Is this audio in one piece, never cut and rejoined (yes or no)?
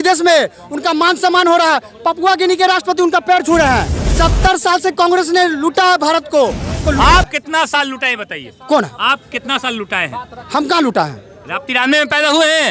no